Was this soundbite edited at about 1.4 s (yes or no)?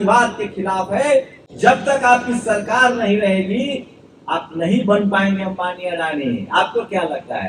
yes